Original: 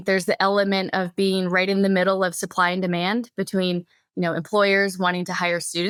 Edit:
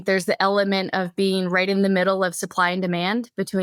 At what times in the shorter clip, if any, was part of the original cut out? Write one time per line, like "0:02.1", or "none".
none